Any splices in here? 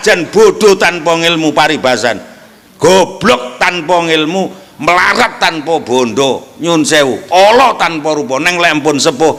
no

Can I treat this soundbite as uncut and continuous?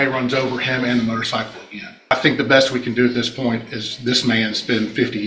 no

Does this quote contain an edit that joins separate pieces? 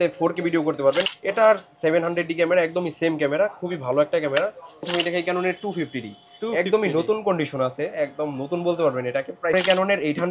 yes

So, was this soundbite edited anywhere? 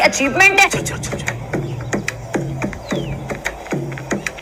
no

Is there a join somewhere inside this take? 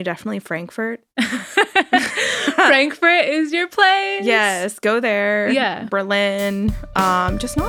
no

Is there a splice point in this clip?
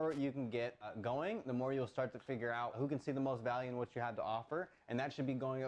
yes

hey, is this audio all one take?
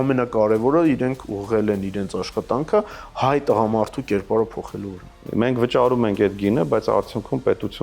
no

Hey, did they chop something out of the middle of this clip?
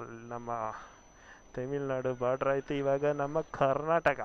no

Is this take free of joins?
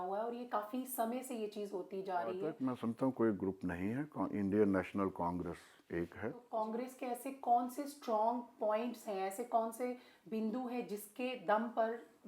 no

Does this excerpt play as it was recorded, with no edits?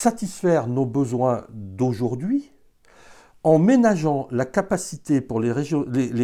yes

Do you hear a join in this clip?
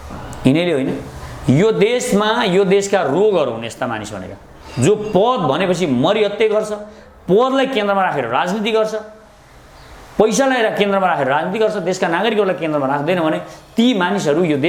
no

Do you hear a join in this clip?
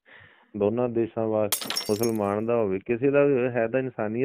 yes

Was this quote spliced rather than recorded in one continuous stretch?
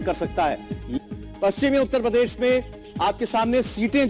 yes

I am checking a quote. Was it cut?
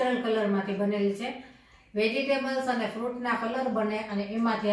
no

